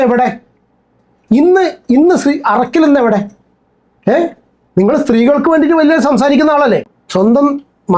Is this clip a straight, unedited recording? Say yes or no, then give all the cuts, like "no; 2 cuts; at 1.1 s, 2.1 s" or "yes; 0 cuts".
no; 1 cut; at 7.0 s